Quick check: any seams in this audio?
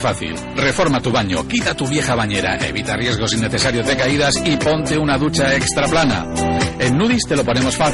no; 0 cuts

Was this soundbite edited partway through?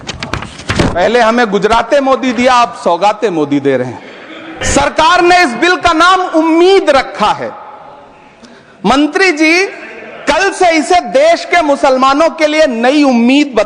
yes; 1 cut; at 4.6 s

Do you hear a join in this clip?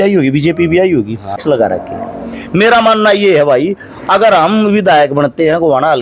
yes; 1 cut; at 1.4 s

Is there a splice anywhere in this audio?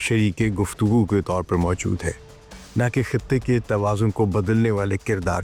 no; 0 cuts

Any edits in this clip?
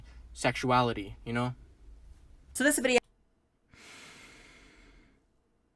no; 0 cuts

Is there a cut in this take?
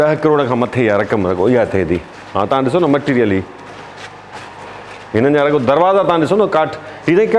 no; 0 cuts

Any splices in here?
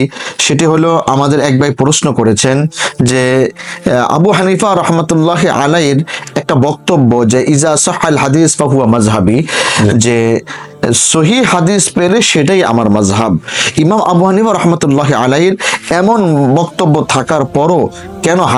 no; 0 cuts

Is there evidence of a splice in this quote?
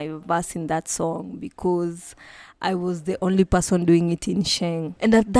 no; 0 cuts

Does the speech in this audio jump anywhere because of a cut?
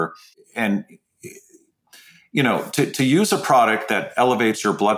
no; 0 cuts

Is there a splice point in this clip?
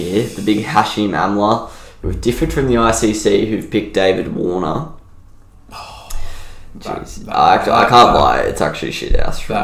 no; 0 cuts

